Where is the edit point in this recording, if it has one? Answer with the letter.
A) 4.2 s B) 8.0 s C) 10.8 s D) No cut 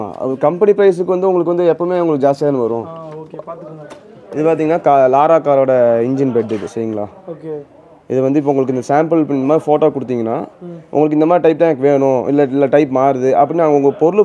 A